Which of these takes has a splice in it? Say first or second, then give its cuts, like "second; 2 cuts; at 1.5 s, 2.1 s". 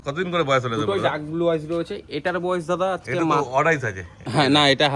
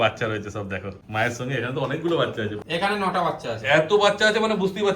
second; 2 cuts; at 0.9 s, 2.6 s